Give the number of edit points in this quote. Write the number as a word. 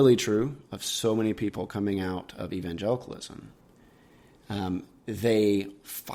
zero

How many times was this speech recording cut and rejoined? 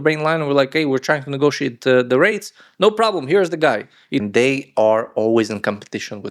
one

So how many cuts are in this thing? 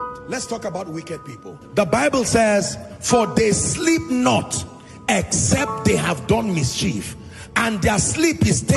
zero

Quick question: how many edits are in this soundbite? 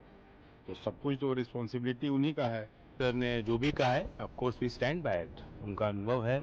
one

